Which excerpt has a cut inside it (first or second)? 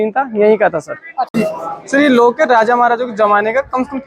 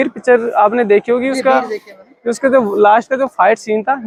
first